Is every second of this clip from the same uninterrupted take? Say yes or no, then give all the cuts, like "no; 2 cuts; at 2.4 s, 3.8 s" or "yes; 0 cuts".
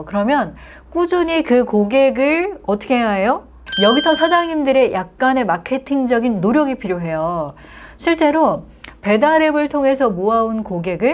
no; 1 cut; at 3.6 s